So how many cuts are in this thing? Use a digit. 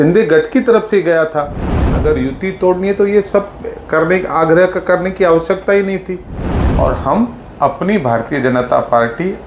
2